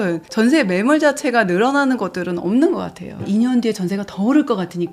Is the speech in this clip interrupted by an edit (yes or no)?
yes